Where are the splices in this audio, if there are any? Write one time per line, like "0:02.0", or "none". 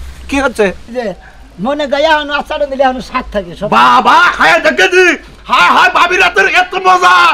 0:00.9